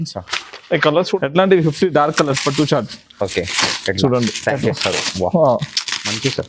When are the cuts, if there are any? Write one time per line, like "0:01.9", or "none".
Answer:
0:01.2